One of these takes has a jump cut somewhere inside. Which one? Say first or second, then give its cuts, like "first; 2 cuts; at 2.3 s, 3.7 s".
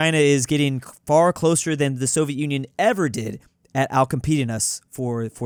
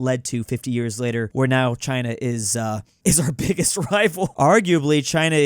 second; 3 cuts; at 1.3 s, 2.9 s, 4.2 s